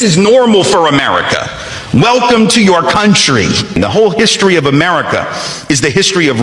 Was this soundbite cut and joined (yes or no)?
yes